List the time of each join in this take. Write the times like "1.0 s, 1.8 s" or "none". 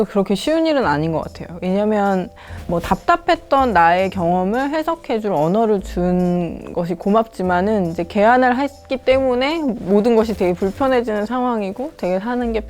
none